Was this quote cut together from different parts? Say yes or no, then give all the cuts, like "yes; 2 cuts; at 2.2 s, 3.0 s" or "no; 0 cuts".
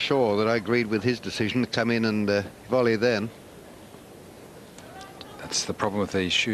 yes; 1 cut; at 2.2 s